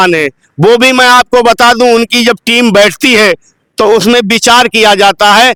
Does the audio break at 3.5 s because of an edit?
no; 0 cuts

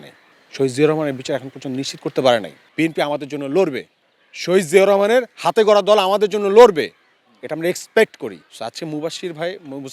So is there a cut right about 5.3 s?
no; 2 cuts; at 2.6 s, 8.5 s

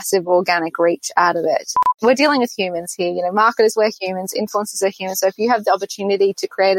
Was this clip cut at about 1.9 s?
yes; 1 cut; at 1.9 s

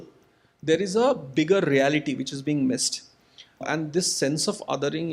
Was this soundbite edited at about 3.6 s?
yes; 1 cut; at 3.6 s

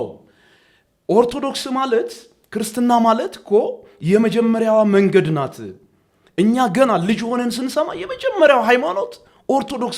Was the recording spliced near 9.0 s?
no; 0 cuts

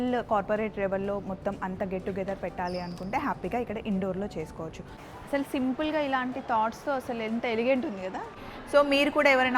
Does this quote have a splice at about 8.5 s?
yes; 2 cuts; at 4.9 s, 8.5 s

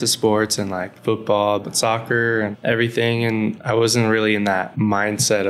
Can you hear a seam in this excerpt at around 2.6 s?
yes; 4 cuts; at 1.7 s, 2.6 s, 3.6 s, 4.7 s

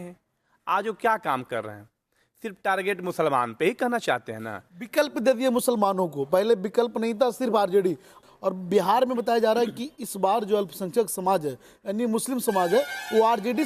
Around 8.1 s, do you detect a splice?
yes; 1 cut; at 8.1 s

